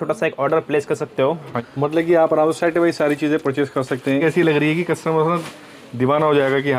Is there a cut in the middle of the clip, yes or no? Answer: yes